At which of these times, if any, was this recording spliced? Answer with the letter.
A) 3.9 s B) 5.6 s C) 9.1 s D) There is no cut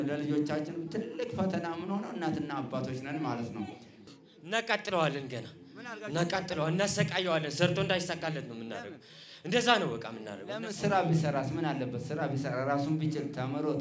A